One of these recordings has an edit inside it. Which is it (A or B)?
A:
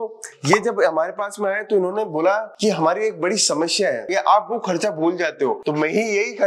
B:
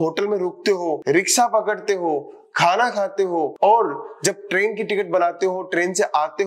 A